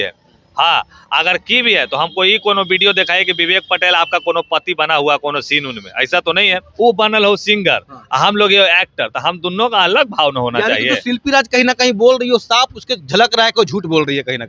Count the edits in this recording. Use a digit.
1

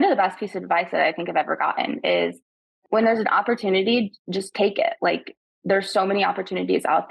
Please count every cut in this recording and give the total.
1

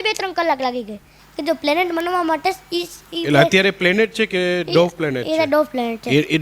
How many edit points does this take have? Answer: 1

